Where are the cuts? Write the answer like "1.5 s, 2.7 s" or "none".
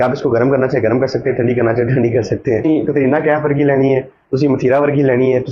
2.6 s